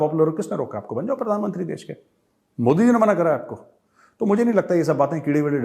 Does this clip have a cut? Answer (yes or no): no